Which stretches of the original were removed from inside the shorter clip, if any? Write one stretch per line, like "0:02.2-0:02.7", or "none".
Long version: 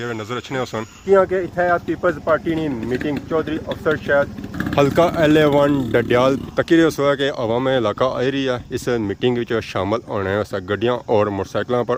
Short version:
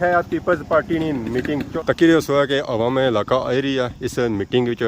0:03.3-0:06.5